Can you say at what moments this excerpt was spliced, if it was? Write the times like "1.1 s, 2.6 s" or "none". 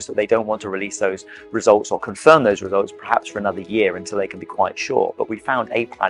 none

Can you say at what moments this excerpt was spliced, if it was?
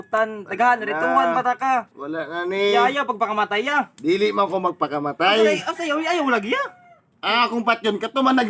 none

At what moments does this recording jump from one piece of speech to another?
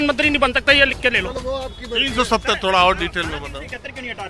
1.3 s

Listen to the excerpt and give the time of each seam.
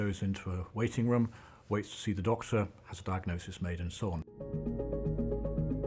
4.2 s

